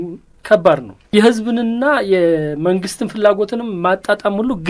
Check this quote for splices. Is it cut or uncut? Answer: uncut